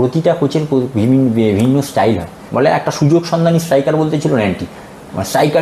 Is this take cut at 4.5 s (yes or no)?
no